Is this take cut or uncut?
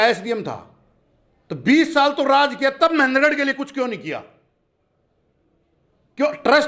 uncut